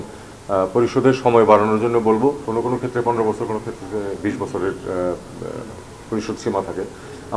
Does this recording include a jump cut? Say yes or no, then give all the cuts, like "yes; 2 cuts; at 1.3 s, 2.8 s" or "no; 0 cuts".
yes; 1 cut; at 2.4 s